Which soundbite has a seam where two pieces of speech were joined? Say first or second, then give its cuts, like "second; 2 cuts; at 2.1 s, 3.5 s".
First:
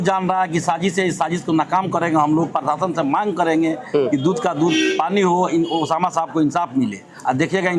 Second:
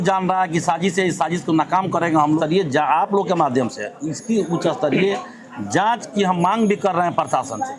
second; 1 cut; at 2.4 s